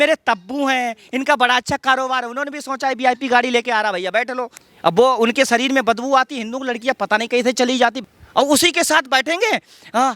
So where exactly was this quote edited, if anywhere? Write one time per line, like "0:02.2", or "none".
0:04.5
0:08.0